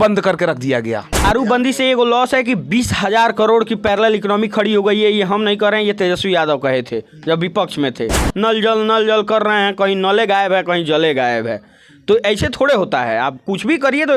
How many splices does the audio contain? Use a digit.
2